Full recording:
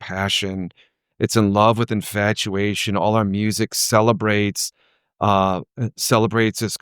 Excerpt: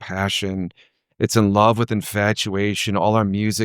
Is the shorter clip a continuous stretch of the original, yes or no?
yes